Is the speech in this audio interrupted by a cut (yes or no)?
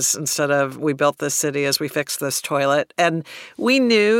yes